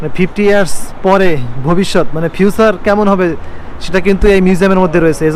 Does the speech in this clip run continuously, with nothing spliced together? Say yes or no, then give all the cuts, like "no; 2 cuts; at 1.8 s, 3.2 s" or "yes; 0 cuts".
yes; 0 cuts